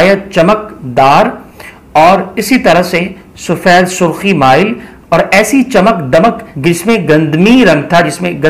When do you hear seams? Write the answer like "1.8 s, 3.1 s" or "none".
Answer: none